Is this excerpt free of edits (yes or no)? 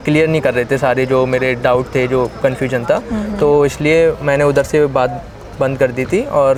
yes